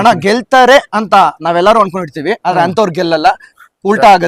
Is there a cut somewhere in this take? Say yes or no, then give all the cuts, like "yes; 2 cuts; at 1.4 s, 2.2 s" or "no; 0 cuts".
no; 0 cuts